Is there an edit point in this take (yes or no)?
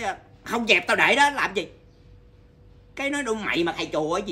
no